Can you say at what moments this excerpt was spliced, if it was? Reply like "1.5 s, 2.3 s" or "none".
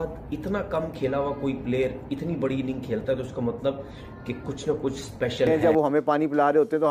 5.5 s